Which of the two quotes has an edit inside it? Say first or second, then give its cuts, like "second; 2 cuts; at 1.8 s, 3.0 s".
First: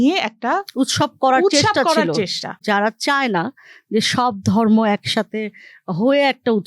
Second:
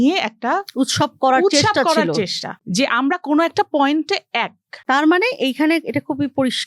first; 1 cut; at 2.6 s